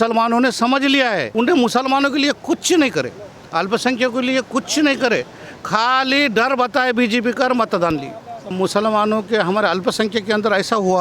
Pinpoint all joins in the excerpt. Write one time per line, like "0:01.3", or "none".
0:01.3
0:08.5